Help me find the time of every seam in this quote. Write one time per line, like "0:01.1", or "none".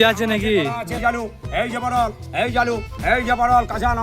0:01.0